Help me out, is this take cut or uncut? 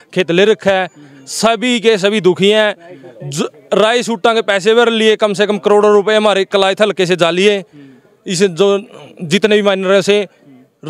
uncut